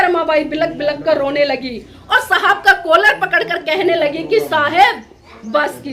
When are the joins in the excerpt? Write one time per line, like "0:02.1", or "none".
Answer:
none